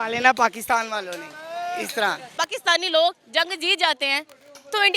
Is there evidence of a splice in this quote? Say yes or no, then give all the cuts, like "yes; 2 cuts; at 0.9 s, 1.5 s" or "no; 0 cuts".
yes; 1 cut; at 2.2 s